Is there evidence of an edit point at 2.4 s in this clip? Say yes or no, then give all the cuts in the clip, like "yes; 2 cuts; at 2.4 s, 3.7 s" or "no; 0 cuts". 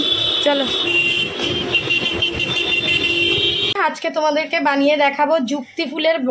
no; 1 cut; at 3.8 s